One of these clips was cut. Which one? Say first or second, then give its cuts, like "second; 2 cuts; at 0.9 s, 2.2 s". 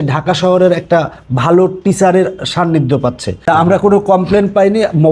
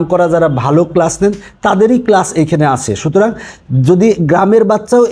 first; 1 cut; at 3.4 s